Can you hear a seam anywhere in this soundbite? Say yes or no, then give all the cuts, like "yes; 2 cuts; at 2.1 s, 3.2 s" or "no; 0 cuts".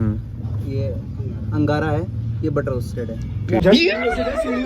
yes; 1 cut; at 3.6 s